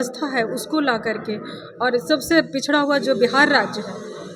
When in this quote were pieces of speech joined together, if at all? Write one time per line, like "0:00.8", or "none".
none

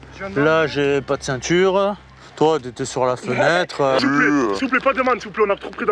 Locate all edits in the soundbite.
0:04.0

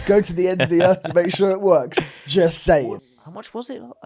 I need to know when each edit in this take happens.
0:02.8

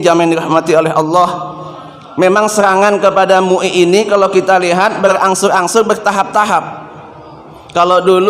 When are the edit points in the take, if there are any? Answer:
0:05.1

